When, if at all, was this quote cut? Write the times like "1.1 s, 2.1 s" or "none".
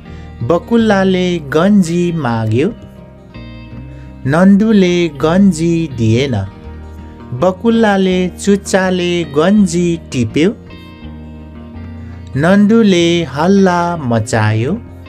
10.6 s, 12.3 s